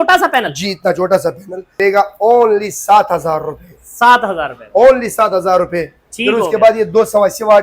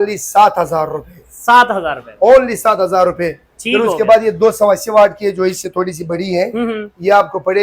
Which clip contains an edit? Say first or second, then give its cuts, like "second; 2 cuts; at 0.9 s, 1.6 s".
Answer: first; 1 cut; at 1.6 s